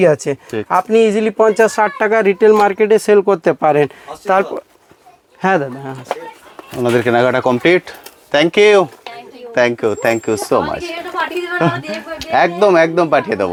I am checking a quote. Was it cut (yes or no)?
no